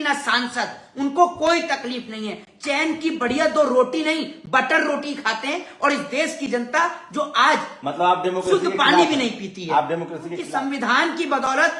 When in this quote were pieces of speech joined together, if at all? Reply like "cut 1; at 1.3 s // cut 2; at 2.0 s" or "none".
cut 1; at 10.5 s